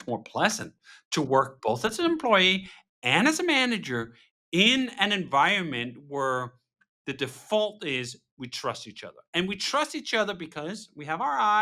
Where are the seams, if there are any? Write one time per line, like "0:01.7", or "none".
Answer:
none